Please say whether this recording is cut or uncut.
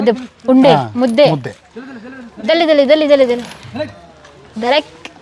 uncut